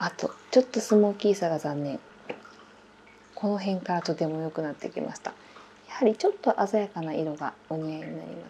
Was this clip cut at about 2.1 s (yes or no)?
yes